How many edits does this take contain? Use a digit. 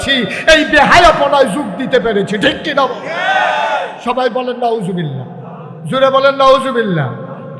1